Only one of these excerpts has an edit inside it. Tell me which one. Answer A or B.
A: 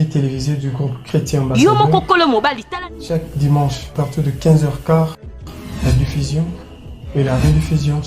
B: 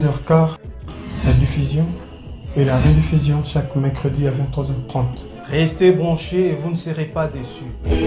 A